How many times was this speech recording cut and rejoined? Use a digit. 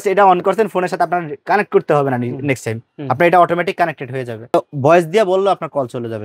1